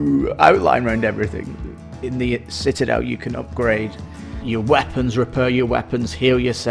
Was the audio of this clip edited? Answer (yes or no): yes